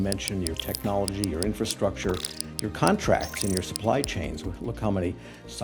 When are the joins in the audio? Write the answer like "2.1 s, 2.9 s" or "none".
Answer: none

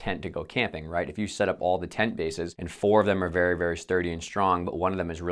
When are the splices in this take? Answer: none

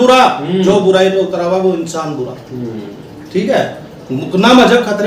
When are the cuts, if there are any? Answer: none

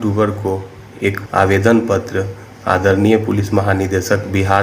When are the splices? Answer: 1.2 s

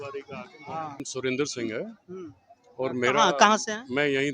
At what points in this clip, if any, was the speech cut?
1.1 s

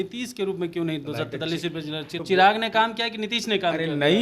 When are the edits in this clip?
2.1 s

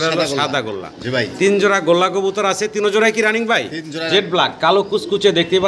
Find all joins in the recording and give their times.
4.1 s

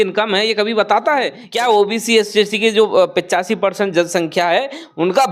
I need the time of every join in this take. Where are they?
1.4 s

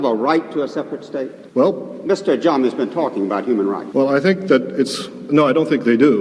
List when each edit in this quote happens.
1.4 s, 3.8 s

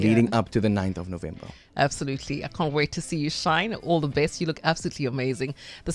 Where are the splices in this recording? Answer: none

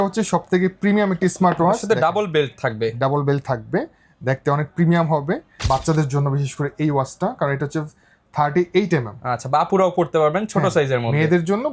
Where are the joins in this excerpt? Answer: 5.5 s

